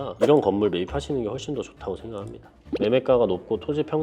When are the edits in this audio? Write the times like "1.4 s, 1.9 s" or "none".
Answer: 2.6 s